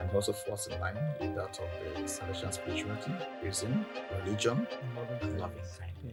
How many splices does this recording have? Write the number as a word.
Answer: zero